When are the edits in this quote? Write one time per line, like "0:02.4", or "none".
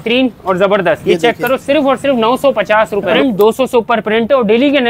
0:01.0
0:03.1